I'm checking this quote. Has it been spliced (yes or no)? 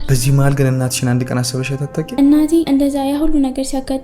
yes